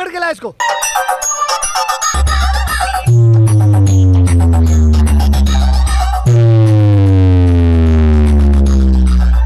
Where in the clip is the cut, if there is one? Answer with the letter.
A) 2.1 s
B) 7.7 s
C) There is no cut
A